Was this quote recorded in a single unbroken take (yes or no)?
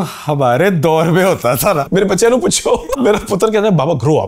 no